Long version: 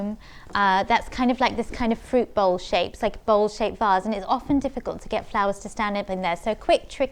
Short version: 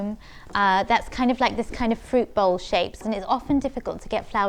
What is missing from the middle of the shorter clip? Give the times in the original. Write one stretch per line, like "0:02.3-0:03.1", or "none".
0:03.0-0:04.0